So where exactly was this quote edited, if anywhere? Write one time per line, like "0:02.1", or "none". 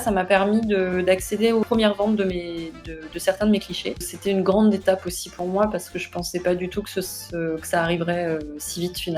0:01.6
0:04.1